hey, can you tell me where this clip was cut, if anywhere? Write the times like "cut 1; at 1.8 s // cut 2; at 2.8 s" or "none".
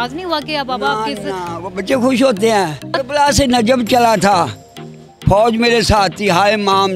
cut 1; at 3.0 s